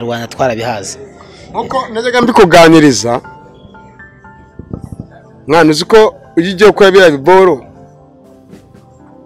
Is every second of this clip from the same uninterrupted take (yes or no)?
yes